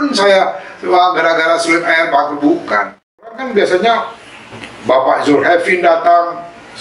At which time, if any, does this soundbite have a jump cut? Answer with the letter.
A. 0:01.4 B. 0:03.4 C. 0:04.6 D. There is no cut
B